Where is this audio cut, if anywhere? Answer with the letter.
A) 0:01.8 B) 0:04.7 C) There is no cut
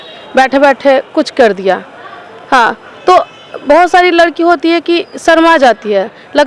C